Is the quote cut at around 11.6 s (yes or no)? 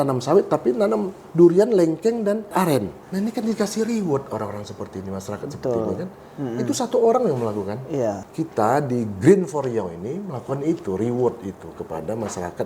no